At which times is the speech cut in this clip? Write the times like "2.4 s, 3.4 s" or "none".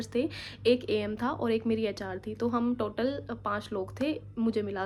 none